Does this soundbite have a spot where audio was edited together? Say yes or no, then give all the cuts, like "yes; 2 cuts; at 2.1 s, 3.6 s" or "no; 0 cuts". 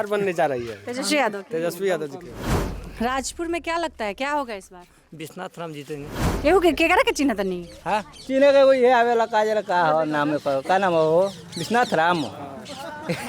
yes; 2 cuts; at 2.6 s, 6.2 s